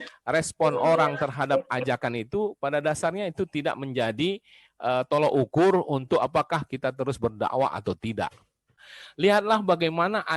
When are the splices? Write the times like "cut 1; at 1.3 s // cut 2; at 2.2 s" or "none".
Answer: cut 1; at 8.6 s